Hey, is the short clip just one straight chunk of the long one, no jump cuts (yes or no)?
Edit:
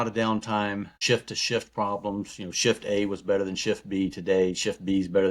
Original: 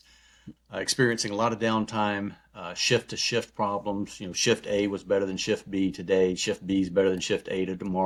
no